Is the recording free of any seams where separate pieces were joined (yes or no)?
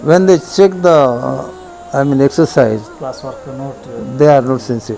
yes